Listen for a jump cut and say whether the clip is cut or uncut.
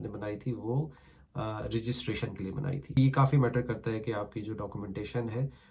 cut